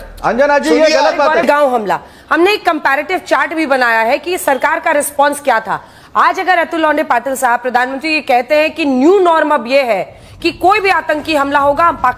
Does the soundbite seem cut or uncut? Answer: uncut